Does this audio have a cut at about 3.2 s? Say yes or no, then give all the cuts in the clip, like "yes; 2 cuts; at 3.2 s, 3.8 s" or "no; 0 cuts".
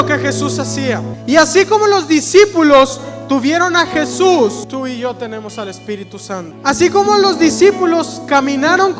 no; 3 cuts; at 1.1 s, 4.6 s, 6.5 s